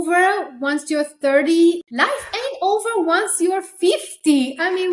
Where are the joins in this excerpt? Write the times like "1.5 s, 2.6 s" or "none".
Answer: 1.8 s